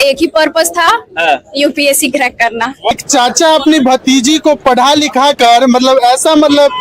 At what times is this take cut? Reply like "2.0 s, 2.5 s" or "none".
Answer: 2.9 s